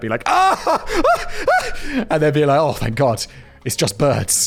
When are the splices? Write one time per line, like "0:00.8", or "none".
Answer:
none